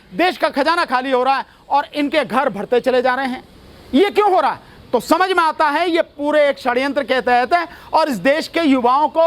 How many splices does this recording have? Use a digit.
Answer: 0